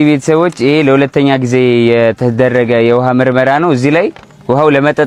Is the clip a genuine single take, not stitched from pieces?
yes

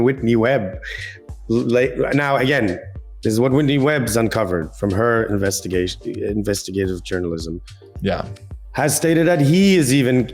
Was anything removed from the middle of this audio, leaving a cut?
no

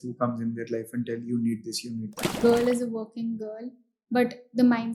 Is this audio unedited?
no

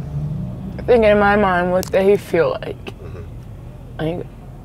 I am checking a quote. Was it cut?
no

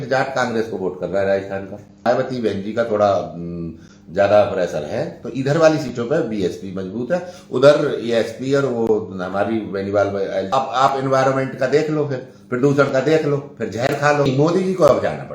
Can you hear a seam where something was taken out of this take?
yes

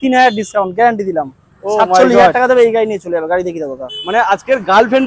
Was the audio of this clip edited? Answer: no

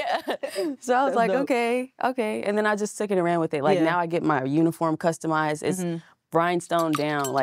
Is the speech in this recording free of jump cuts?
yes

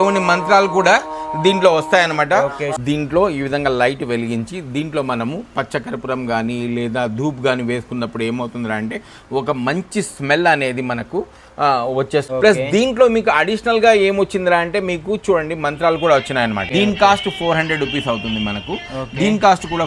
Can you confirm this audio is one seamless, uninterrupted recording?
no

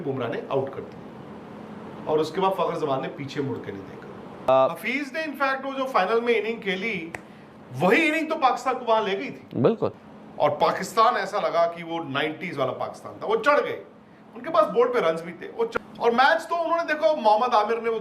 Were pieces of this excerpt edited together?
yes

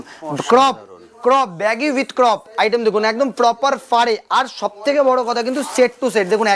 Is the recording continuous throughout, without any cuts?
yes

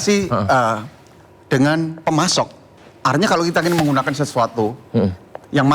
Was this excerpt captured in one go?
no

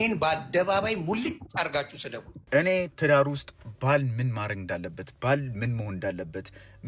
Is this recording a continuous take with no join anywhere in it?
no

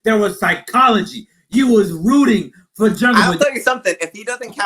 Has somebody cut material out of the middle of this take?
yes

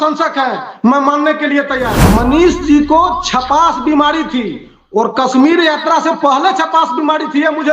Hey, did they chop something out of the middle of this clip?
yes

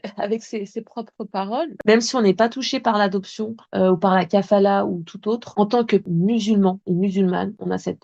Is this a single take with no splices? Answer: no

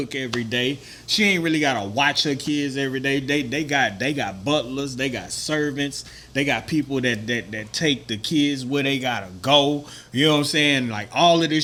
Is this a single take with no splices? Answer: yes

